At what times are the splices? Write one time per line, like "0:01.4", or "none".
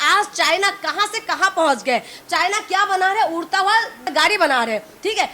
0:04.1